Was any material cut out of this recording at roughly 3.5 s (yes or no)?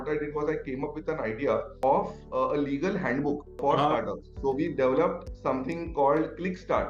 yes